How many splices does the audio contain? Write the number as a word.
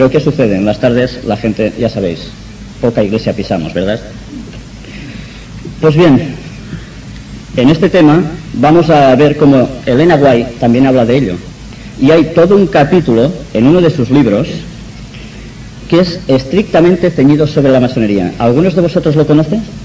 zero